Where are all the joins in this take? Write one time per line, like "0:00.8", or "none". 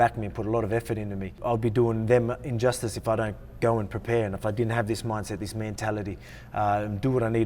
0:01.4